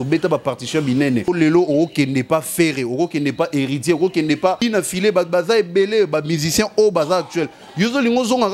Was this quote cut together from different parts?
yes; 2 cuts; at 1.3 s, 4.6 s

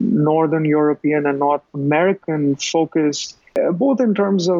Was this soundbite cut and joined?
yes; 2 cuts; at 1.7 s, 3.6 s

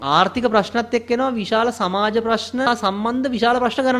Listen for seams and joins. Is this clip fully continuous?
no; 1 cut; at 2.7 s

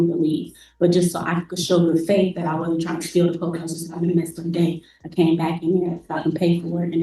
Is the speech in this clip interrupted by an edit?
no; 0 cuts

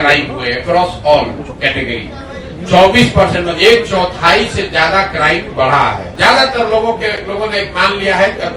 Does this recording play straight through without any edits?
no; 1 cut; at 6.1 s

